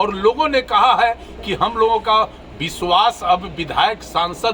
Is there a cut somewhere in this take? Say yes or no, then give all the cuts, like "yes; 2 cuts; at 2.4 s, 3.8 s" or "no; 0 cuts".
no; 0 cuts